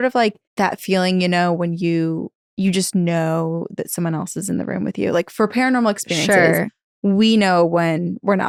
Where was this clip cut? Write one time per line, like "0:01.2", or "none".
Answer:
none